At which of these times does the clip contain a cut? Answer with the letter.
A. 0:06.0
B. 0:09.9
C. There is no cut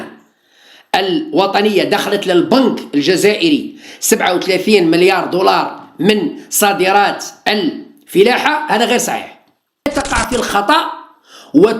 B